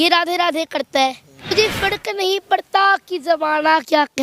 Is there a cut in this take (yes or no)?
yes